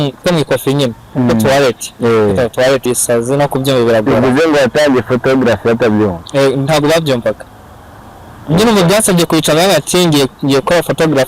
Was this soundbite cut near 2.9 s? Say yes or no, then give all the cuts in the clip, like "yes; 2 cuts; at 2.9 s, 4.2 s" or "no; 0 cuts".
yes; 1 cut; at 2.9 s